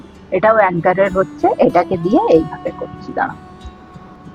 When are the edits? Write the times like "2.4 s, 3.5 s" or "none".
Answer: 3.4 s